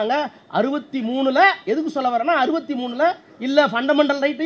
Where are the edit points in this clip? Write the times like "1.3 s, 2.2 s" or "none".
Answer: none

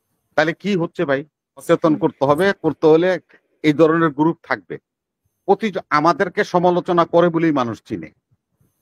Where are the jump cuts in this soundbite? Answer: 1.6 s

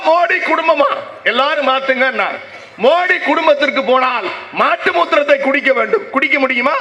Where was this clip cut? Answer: none

